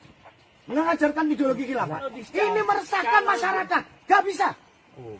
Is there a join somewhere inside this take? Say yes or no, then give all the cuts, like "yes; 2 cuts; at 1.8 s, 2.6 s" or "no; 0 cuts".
yes; 1 cut; at 2.1 s